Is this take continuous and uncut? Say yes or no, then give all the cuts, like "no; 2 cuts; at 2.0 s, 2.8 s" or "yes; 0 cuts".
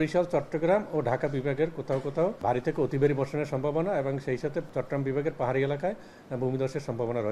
no; 2 cuts; at 2.4 s, 4.7 s